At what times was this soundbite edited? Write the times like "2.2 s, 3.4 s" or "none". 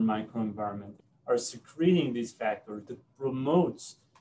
2.9 s

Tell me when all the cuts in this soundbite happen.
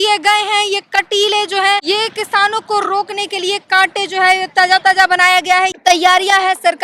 1.8 s, 5.7 s

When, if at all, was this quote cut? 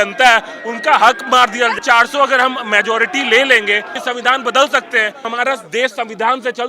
1.8 s, 4.0 s, 5.2 s

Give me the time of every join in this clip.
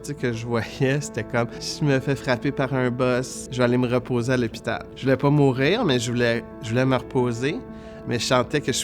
1.6 s, 3.4 s, 4.9 s

